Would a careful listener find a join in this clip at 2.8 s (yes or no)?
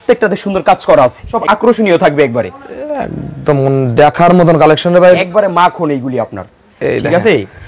no